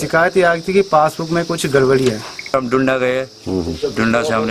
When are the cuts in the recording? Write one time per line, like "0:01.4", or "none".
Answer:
0:02.5

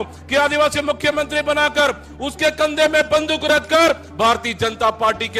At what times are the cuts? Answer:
none

